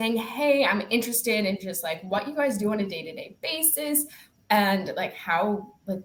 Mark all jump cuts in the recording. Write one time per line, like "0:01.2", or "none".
none

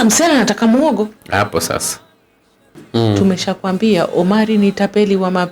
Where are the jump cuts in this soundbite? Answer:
0:02.8

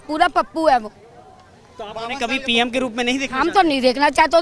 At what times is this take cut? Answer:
none

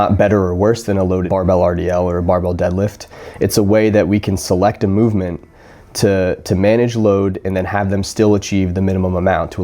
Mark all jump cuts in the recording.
none

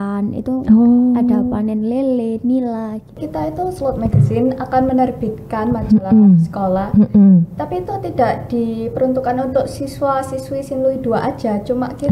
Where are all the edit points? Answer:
0:03.2

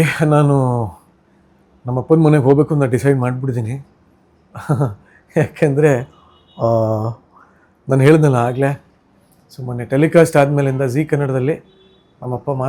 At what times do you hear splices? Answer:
none

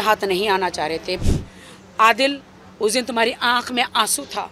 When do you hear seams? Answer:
0:01.2

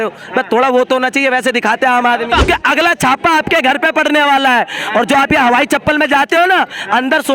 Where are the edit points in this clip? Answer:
0:02.4

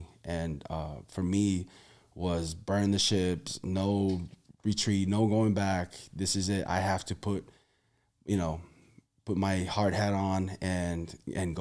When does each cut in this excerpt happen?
none

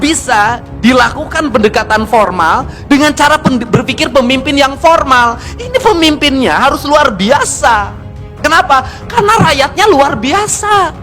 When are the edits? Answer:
none

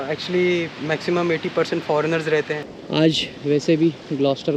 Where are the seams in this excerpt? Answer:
0:02.6

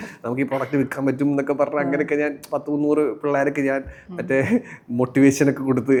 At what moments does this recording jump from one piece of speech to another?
none

